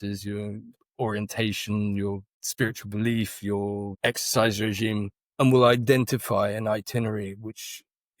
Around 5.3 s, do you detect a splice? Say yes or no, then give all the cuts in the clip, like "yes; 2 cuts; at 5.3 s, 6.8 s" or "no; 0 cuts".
no; 2 cuts; at 2.4 s, 3.9 s